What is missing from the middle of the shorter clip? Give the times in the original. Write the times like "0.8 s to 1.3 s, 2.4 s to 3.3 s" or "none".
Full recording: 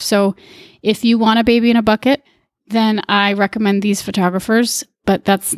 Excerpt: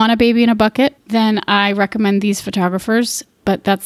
2.3 s to 2.6 s